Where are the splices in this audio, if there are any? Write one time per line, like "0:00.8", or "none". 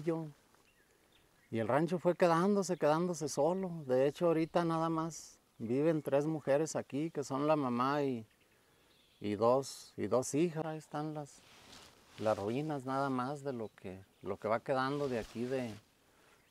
0:10.6